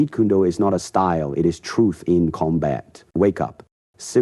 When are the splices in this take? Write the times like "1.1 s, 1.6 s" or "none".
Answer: 3.1 s

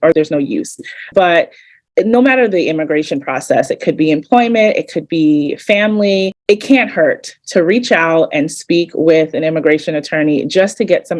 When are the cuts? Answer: 6.4 s

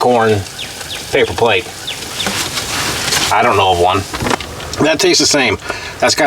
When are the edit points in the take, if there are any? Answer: 4.4 s

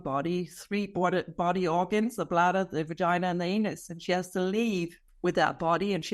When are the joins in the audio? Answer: 5.0 s

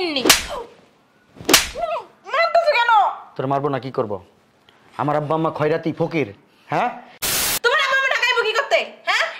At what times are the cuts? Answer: 7.3 s

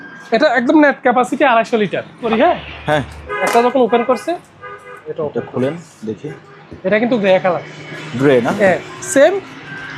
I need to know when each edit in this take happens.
2.3 s

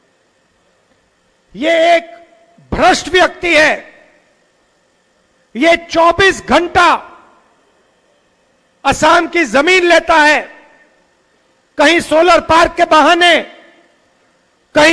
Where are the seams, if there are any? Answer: none

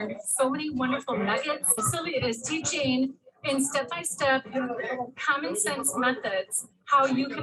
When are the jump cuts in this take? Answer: none

